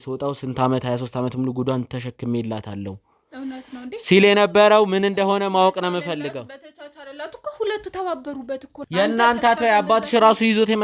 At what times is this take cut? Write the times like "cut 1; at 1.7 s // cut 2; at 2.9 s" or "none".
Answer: cut 1; at 8.7 s